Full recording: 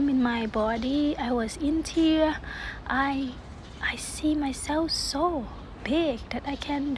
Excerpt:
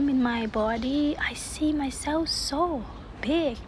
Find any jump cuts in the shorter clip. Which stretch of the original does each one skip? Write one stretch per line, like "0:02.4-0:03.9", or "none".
0:01.2-0:03.8